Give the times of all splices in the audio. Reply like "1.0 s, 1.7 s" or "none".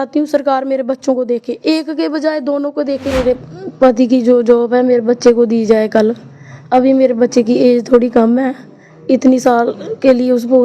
3.2 s